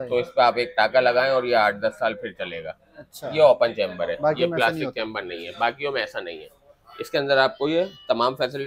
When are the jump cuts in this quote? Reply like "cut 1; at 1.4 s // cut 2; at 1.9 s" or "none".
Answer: none